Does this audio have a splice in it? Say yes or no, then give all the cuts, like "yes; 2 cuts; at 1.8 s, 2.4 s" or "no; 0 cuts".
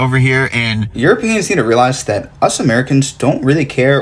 yes; 1 cut; at 1.0 s